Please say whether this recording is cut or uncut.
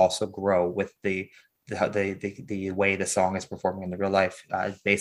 uncut